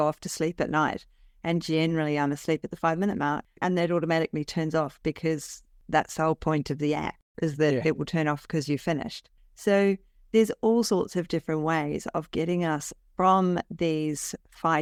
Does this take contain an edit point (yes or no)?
no